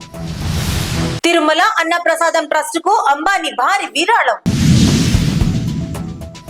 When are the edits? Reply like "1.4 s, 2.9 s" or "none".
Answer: none